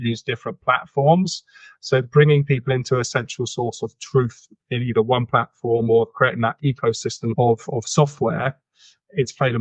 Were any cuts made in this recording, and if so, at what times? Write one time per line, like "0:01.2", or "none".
0:07.3